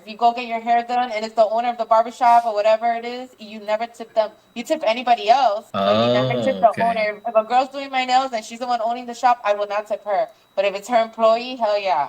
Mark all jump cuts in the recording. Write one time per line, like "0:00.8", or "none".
0:05.7